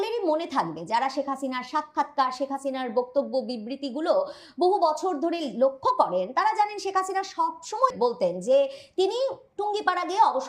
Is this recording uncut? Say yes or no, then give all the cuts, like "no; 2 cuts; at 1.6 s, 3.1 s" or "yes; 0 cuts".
no; 1 cut; at 7.9 s